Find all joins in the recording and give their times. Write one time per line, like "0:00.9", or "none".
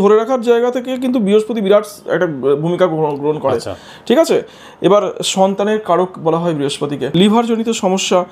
none